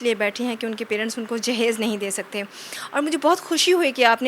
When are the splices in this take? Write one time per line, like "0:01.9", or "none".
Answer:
none